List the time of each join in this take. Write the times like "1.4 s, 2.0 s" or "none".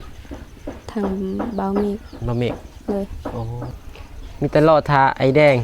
3.8 s